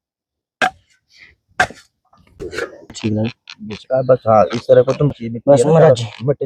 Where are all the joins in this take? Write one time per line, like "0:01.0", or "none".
none